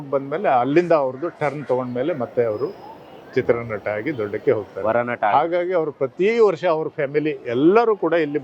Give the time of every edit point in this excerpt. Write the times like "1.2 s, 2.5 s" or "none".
none

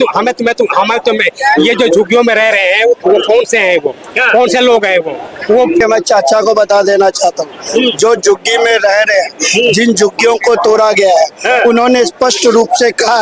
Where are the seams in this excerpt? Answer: 5.8 s

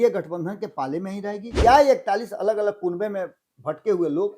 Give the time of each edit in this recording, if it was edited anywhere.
1.5 s

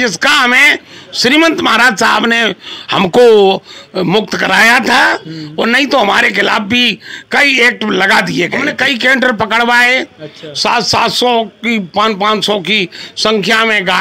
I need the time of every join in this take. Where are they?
8.6 s

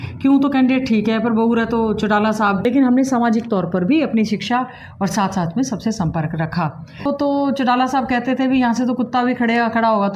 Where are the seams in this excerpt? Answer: 2.6 s, 7.1 s

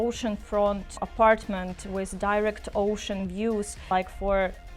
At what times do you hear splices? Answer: 1.0 s, 3.8 s

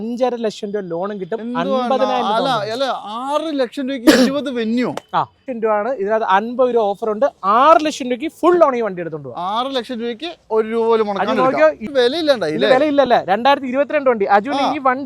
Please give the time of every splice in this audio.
5.5 s, 11.8 s

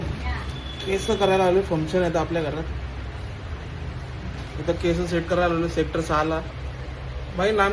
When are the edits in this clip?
none

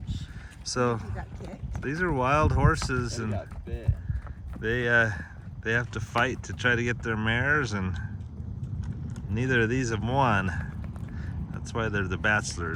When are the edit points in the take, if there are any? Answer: none

